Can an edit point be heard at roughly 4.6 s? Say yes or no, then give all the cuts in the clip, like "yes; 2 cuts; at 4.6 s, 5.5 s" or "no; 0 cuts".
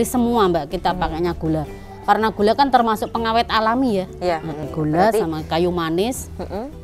yes; 1 cut; at 4.6 s